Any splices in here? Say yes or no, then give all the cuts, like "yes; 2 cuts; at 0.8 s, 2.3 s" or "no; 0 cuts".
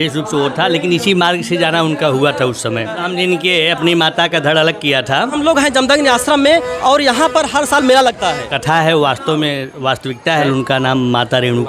yes; 4 cuts; at 3.0 s, 5.4 s, 8.5 s, 10.4 s